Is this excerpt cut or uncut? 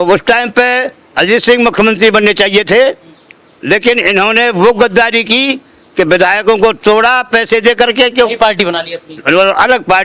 uncut